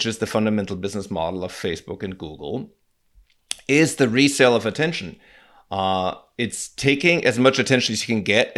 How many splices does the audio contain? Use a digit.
0